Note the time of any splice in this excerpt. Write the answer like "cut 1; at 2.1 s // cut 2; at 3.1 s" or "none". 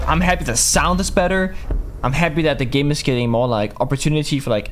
none